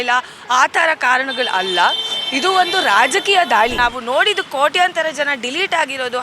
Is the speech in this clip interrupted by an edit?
yes; 1 cut; at 3.8 s

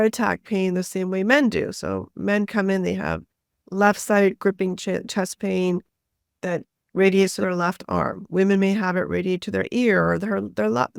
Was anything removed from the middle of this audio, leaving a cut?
no; 0 cuts

